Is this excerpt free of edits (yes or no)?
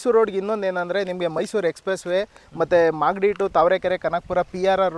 yes